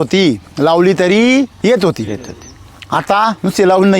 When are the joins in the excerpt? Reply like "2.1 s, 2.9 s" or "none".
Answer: 1.5 s